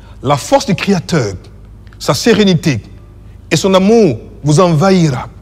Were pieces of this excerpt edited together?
no; 0 cuts

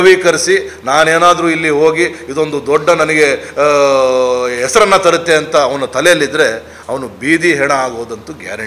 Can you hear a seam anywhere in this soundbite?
no; 0 cuts

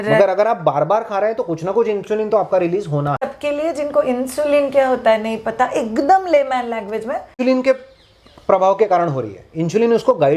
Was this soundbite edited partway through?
yes; 2 cuts; at 3.3 s, 7.3 s

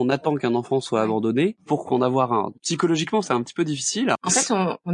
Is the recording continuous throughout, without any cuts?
no; 3 cuts; at 1.6 s, 2.5 s, 4.1 s

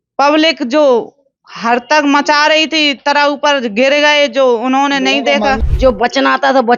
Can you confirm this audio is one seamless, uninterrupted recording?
no; 1 cut; at 5.6 s

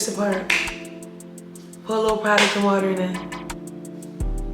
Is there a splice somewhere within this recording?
yes; 1 cut; at 3.6 s

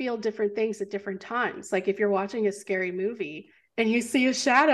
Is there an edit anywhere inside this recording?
no; 0 cuts

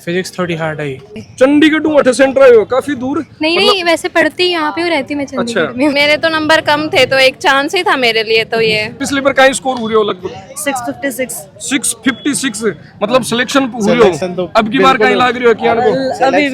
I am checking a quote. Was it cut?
yes; 3 cuts; at 1.2 s, 5.9 s, 9.0 s

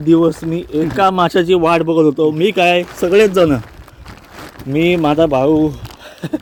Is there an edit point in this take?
no; 0 cuts

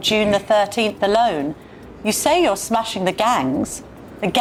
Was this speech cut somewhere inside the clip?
no; 0 cuts

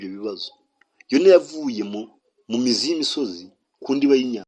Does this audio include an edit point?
no; 0 cuts

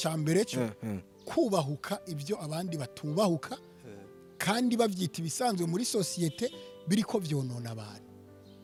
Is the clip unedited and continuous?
yes; 0 cuts

